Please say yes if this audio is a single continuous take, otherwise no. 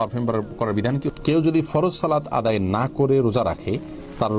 no